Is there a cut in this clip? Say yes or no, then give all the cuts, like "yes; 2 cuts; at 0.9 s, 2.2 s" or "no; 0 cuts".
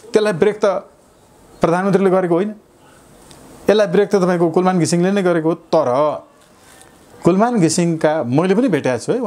no; 0 cuts